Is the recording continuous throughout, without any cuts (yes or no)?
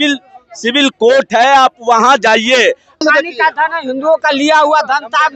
no